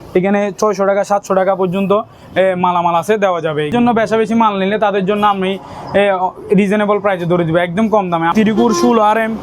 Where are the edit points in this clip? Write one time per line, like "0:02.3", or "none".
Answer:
0:03.7
0:08.3